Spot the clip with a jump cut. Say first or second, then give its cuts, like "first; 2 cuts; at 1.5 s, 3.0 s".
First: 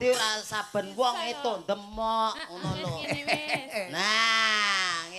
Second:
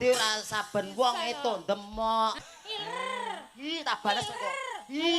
second; 1 cut; at 2.5 s